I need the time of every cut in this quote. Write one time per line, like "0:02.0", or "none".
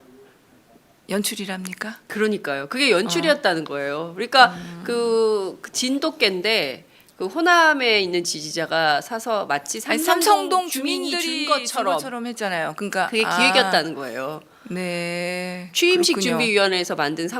0:06.8